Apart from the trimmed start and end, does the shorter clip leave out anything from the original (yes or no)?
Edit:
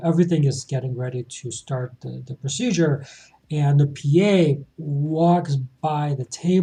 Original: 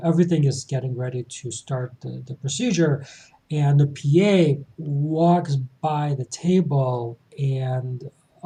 no